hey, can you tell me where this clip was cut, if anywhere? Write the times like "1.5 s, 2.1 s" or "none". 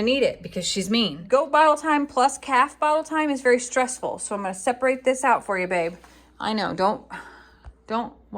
1.2 s